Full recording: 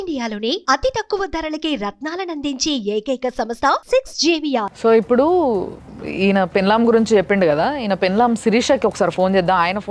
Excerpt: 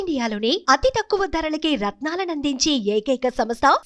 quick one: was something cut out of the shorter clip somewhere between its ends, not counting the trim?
no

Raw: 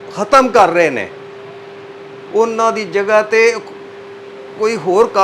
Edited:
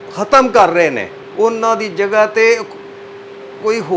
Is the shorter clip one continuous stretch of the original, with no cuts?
no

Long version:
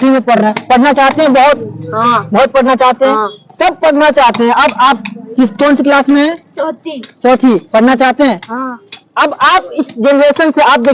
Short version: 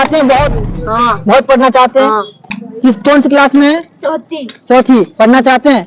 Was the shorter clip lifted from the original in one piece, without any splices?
no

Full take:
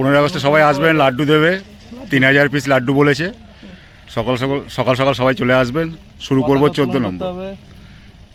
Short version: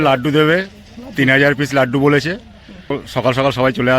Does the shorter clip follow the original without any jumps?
no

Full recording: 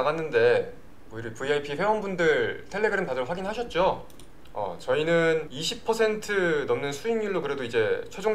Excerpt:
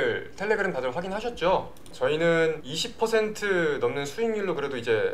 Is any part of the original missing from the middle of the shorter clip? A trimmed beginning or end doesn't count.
yes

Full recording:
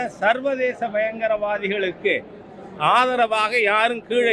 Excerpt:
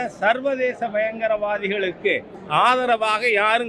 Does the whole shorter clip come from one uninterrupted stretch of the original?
no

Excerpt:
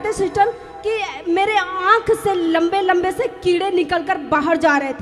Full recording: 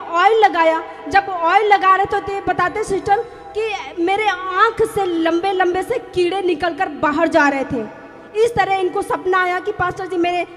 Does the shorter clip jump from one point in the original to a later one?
no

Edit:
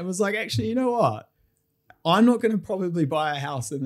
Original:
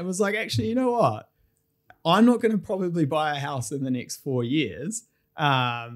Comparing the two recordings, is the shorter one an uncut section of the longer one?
yes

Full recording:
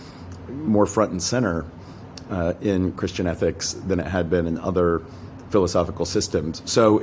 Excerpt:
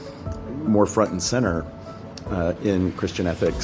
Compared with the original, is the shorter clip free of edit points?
yes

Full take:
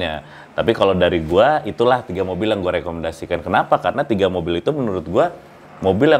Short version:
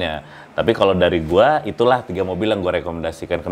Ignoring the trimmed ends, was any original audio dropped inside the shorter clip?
no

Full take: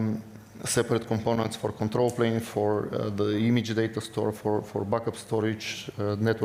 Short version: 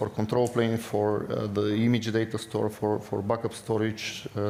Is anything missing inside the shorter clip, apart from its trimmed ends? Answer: no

